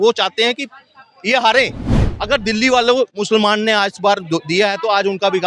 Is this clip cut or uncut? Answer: cut